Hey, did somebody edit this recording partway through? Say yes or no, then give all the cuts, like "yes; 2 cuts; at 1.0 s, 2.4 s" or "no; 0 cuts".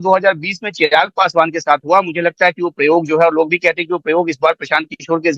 no; 0 cuts